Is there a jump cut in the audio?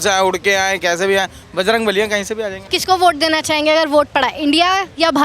yes; 1 cut; at 2.7 s

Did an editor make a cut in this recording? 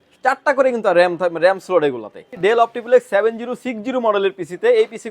yes; 1 cut; at 2.3 s

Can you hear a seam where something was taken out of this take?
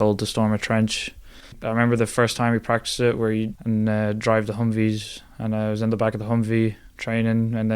yes; 2 cuts; at 1.6 s, 3.6 s

